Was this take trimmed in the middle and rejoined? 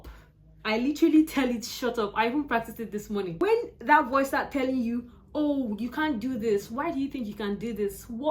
yes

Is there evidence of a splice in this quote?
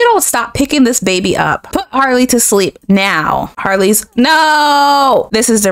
no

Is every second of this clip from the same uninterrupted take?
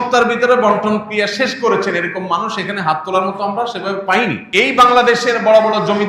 no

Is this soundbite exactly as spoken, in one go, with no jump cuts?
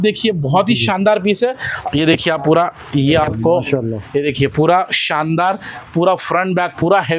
no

